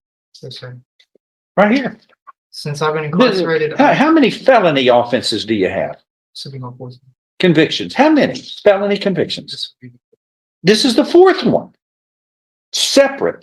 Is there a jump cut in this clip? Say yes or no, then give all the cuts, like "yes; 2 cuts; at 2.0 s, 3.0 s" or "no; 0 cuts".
no; 0 cuts